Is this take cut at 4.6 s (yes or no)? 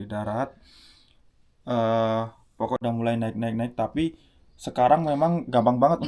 no